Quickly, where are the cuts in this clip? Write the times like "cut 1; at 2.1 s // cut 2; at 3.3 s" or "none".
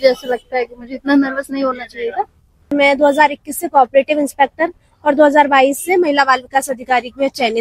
cut 1; at 2.7 s